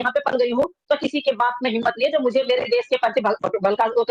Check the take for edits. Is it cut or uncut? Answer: uncut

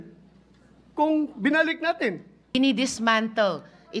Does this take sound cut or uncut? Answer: cut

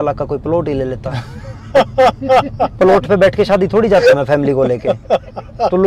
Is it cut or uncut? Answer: uncut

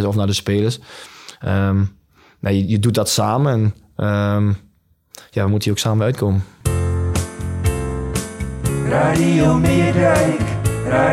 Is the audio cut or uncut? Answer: cut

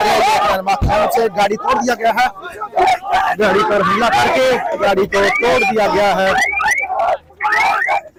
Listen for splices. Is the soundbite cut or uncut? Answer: uncut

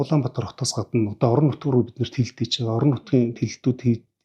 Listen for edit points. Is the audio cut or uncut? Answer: uncut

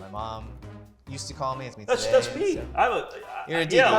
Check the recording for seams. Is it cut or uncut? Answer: cut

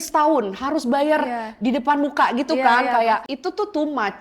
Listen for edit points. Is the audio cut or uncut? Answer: cut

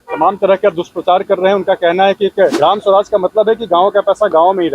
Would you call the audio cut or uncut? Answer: cut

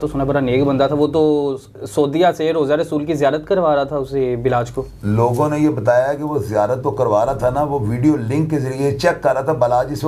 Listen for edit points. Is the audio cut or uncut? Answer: uncut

